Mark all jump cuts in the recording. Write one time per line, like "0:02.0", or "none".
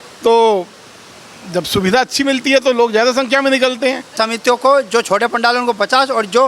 0:04.1

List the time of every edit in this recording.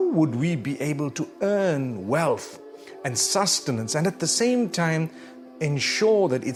none

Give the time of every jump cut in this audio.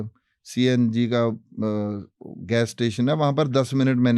none

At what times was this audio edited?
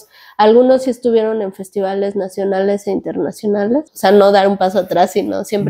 0:03.9

